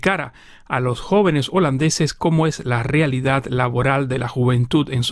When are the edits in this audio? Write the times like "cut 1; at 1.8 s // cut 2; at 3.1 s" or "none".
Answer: none